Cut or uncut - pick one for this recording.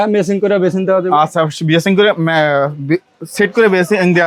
uncut